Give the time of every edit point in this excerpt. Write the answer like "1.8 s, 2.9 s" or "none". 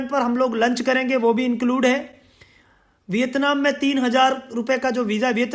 none